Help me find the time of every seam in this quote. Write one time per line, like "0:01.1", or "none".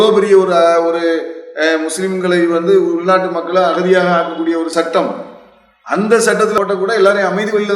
0:06.5